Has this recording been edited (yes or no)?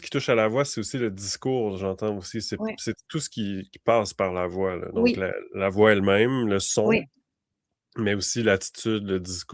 no